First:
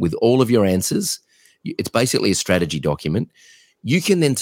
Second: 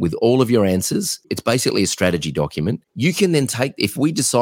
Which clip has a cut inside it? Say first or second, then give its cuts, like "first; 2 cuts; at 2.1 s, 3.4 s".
second; 2 cuts; at 1.2 s, 2.9 s